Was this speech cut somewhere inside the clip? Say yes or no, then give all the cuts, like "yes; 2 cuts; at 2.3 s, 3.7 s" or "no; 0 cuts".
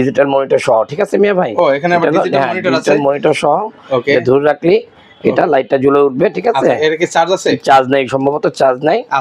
no; 0 cuts